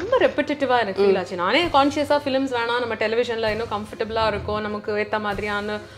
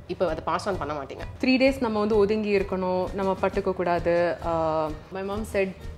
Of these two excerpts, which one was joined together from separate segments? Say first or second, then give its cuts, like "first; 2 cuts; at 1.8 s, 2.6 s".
second; 2 cuts; at 1.2 s, 5.1 s